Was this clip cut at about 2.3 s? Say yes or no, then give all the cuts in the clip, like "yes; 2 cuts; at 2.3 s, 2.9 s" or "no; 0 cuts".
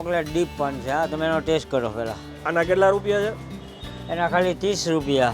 yes; 1 cut; at 2.3 s